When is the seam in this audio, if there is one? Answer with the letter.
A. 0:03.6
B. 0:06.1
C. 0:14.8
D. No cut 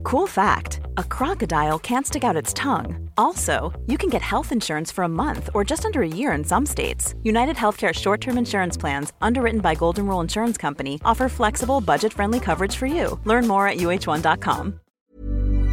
C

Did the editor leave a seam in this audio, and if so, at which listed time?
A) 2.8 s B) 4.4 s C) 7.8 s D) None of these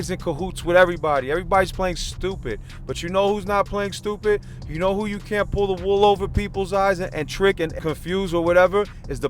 C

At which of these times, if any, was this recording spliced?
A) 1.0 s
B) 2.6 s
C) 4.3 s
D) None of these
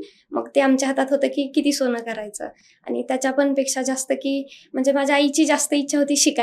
D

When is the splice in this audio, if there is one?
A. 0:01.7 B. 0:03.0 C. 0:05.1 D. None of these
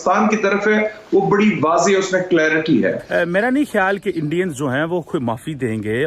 B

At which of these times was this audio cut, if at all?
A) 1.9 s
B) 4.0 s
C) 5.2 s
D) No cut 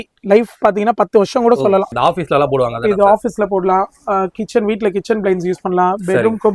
A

